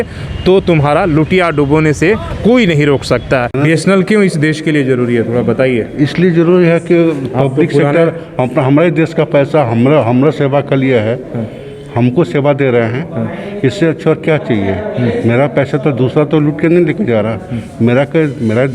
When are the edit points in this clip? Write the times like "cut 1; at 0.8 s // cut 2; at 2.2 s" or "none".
cut 1; at 3.6 s